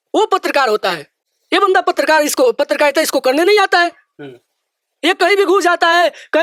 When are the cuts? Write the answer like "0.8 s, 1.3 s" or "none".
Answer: none